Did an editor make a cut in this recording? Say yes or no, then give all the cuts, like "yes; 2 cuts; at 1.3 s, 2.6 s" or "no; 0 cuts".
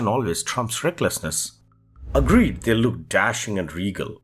yes; 1 cut; at 1.5 s